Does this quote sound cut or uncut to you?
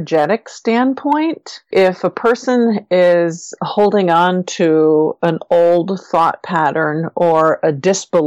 cut